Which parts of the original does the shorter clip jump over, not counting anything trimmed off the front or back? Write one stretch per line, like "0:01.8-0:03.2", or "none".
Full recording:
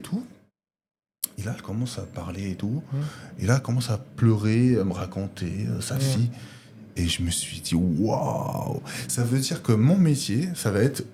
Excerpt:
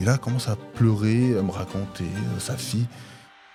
none

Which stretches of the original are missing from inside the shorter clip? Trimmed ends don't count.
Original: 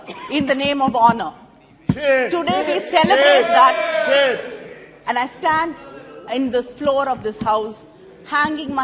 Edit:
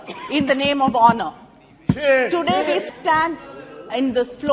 0:02.9-0:05.3

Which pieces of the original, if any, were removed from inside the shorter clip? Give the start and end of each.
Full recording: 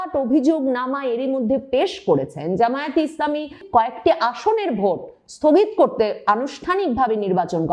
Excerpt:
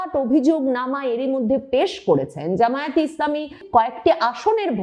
none

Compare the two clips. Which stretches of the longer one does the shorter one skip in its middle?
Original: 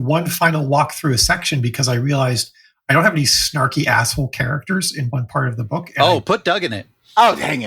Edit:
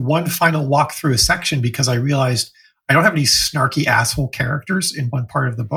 none

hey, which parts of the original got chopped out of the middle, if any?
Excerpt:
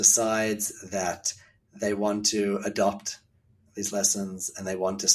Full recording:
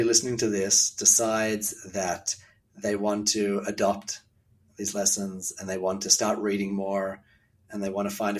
none

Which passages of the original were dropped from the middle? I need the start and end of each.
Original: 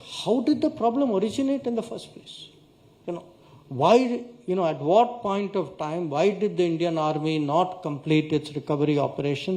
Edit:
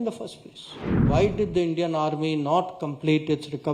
0:02.8-0:06.1

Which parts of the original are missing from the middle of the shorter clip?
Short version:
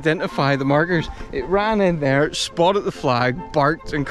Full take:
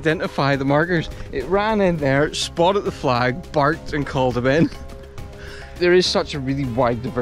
none

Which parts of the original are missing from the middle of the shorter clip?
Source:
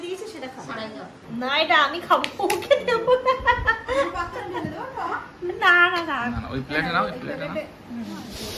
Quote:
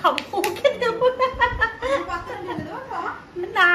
none

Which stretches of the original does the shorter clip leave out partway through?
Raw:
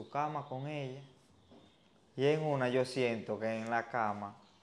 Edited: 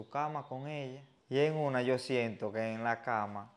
0:01.1-0:02.0

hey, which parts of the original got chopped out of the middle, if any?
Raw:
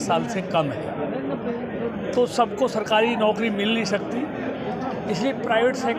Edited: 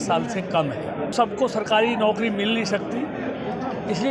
0:01.1-0:02.3

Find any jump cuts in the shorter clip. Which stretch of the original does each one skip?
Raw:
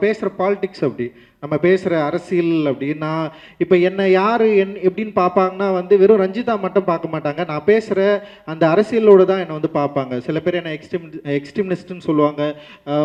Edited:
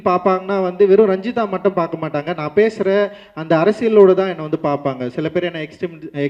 none

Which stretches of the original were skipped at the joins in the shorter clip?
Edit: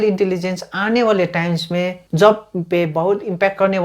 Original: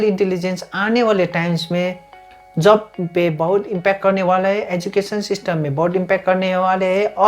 0:02.0-0:02.5

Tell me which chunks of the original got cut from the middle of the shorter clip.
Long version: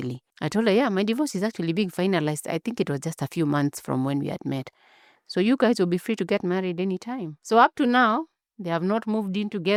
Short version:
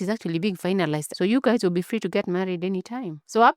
0:02.4-0:05.2

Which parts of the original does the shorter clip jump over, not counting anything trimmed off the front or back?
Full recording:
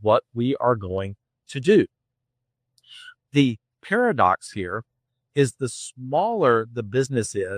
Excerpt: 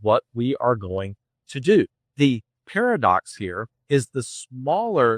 0:02.0-0:03.2
0:04.9-0:05.2

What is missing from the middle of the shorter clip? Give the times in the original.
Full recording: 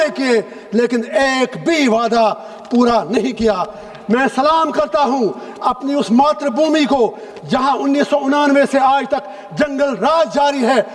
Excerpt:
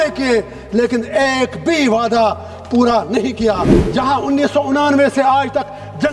0:03.8-0:07.3

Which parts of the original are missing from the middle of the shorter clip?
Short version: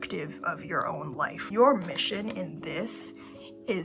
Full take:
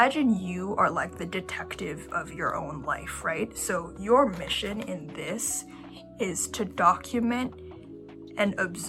0:03.1-0:03.9

